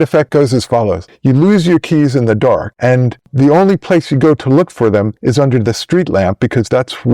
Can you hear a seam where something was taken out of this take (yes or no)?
yes